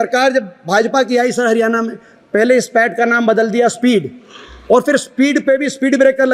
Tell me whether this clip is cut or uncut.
uncut